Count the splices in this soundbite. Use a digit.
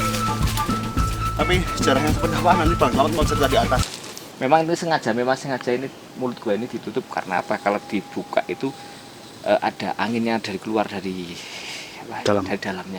1